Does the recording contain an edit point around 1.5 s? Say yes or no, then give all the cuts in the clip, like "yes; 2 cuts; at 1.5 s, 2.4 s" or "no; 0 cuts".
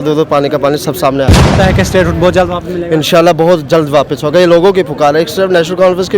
yes; 1 cut; at 1.5 s